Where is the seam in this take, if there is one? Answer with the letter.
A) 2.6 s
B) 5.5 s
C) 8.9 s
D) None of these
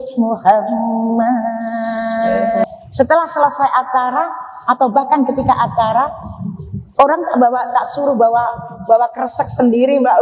A